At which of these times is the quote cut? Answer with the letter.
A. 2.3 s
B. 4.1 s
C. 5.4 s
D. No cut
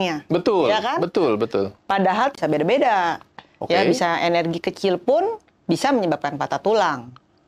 A